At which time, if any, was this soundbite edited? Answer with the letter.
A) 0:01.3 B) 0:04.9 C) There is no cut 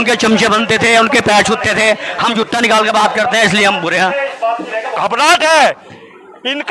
B